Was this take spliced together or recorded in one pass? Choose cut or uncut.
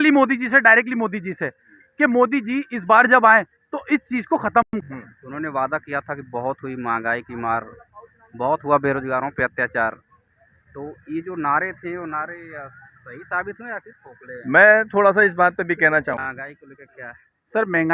cut